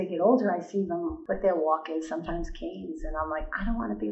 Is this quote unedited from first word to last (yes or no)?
no